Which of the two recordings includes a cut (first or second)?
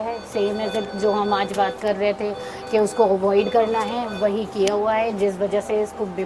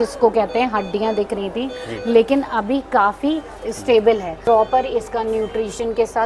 second